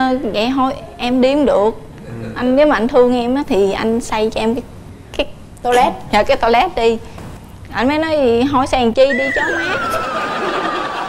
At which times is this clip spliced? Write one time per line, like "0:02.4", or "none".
none